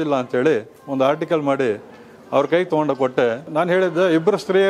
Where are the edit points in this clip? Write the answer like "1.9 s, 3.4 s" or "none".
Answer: 3.4 s